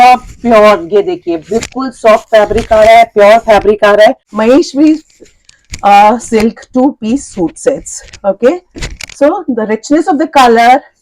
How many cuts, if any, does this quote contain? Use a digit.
1